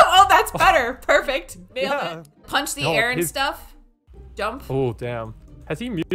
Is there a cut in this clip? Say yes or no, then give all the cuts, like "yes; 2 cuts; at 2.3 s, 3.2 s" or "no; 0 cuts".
no; 0 cuts